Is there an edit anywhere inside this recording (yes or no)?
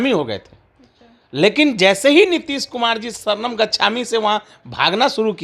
no